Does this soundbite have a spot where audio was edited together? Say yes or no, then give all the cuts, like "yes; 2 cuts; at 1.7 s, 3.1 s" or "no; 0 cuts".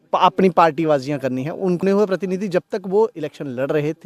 yes; 1 cut; at 1.8 s